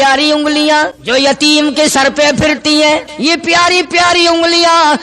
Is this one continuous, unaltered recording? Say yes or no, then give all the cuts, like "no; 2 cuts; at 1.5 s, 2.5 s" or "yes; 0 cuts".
no; 2 cuts; at 1.0 s, 3.1 s